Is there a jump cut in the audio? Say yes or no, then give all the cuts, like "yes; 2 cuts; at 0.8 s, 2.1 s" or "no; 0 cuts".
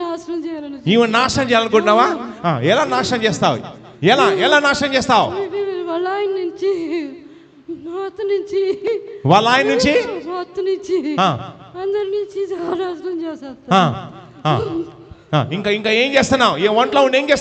no; 0 cuts